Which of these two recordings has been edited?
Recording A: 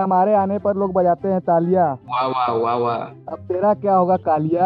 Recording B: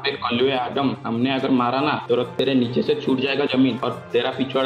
B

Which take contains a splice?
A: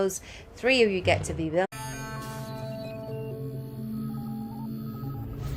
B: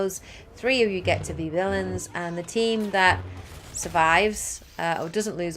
B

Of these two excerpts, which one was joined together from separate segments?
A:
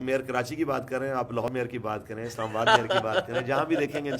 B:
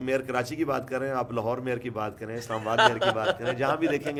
A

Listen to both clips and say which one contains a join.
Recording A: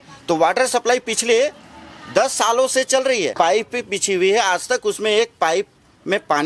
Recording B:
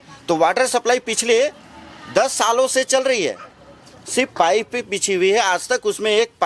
A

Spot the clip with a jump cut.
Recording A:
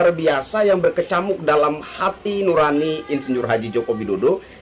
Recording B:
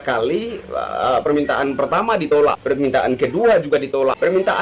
B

